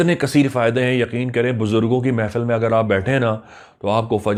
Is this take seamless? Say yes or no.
yes